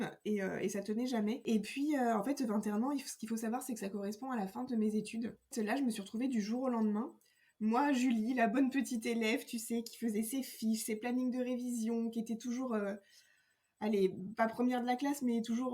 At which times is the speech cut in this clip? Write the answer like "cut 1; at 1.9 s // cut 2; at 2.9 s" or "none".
cut 1; at 1.4 s // cut 2; at 5.5 s